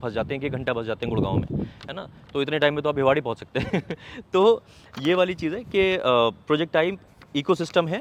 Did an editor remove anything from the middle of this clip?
no; 0 cuts

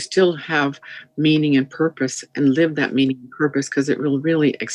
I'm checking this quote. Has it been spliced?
no; 0 cuts

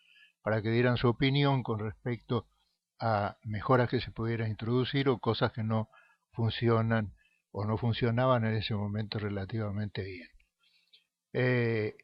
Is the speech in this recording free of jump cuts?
no; 1 cut; at 6.8 s

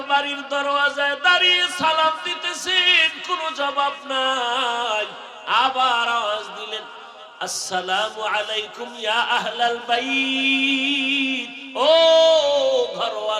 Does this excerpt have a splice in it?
no; 0 cuts

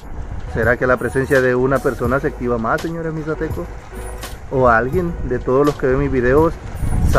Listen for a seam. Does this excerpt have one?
no; 0 cuts

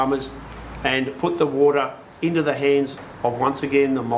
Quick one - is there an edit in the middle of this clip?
no; 0 cuts

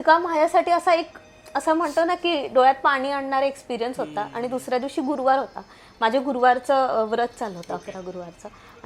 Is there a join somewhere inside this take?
no; 0 cuts

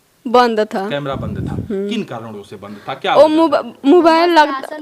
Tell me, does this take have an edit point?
no; 0 cuts

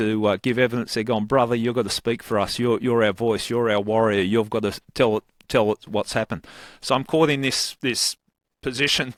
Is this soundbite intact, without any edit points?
yes; 0 cuts

